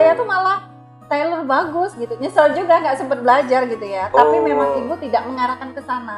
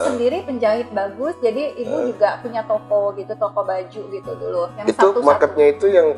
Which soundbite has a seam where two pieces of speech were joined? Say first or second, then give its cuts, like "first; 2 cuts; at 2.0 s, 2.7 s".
second; 1 cut; at 4.8 s